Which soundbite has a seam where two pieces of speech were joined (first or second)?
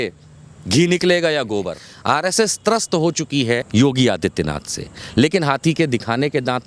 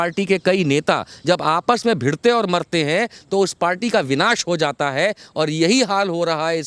first